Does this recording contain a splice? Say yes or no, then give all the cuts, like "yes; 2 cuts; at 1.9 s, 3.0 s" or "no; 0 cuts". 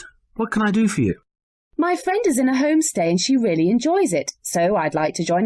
yes; 1 cut; at 3.2 s